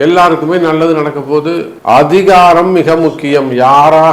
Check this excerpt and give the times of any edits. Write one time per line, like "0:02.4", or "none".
0:01.7